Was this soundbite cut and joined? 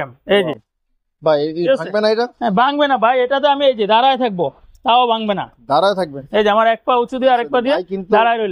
no; 0 cuts

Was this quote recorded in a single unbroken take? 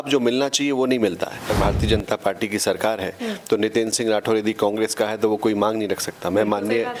no; 1 cut; at 1.5 s

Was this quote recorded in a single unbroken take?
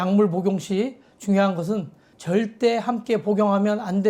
yes; 0 cuts

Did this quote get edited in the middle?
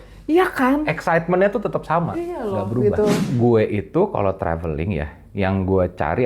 yes; 1 cut; at 3.2 s

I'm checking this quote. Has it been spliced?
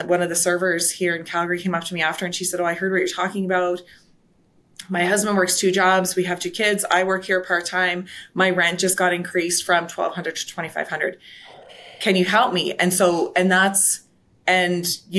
no; 0 cuts

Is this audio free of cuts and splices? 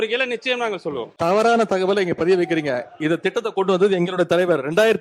no; 1 cut; at 1.1 s

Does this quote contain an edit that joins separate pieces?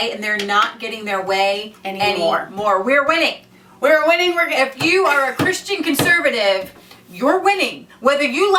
no; 0 cuts

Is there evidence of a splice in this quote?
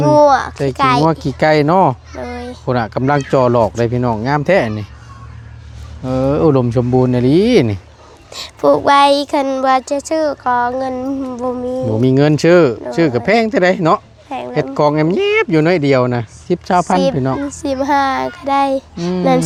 no; 0 cuts

